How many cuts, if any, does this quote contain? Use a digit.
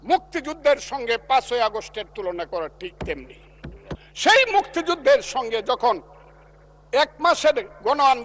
1